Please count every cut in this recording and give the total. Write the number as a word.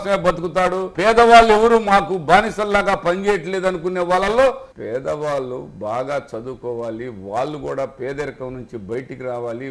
two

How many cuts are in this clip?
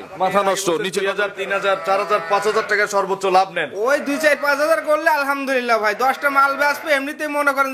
one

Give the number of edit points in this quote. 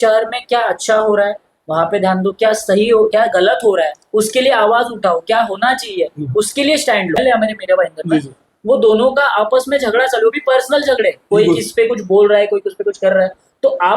one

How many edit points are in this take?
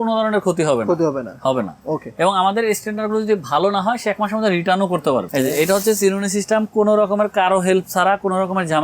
one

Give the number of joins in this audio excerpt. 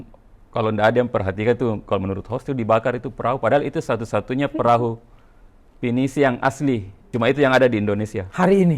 one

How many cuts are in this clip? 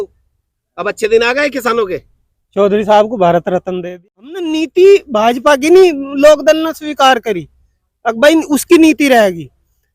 one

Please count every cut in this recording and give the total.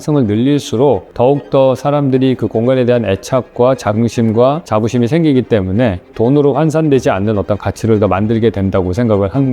two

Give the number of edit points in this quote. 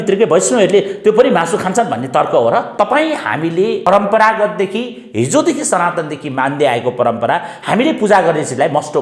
two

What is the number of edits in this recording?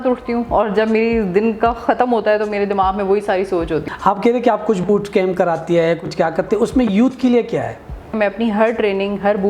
two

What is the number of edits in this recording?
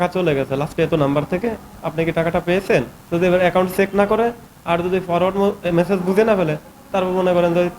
one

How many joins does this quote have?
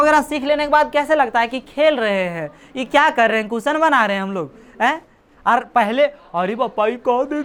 zero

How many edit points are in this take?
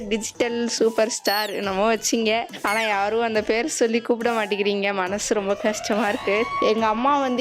one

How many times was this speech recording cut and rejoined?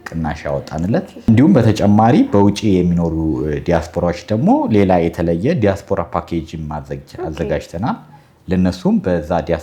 one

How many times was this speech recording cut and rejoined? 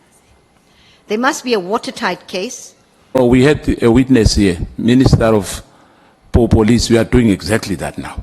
one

